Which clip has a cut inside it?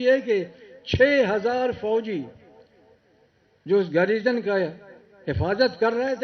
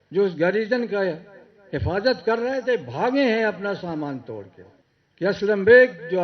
second; 1 cut; at 4.7 s

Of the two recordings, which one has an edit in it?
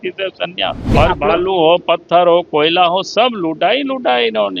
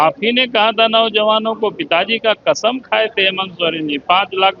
first; 1 cut; at 0.9 s

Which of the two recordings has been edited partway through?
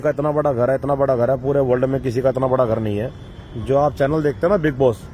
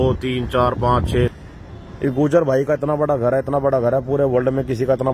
second; 1 cut; at 1.3 s

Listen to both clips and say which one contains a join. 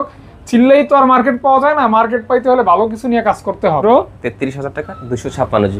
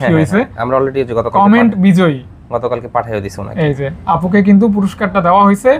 first; 1 cut; at 3.8 s

